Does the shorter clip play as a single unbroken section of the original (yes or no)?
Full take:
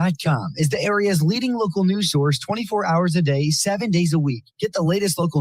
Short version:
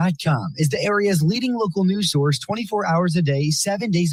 yes